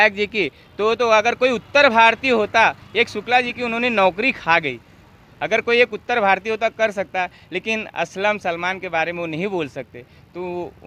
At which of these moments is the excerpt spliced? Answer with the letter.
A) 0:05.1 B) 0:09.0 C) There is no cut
C